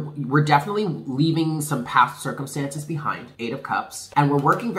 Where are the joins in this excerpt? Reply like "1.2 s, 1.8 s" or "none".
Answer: 3.8 s